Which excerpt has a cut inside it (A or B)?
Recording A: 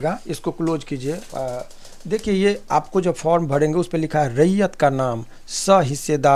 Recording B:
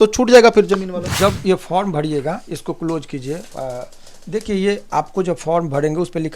B